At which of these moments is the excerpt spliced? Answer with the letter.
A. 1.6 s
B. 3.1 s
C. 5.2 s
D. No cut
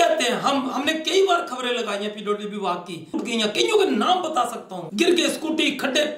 B